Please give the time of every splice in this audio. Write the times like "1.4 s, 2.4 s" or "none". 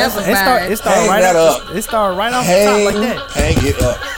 3.2 s